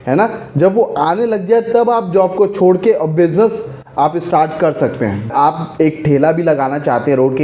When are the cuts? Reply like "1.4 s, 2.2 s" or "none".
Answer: 5.3 s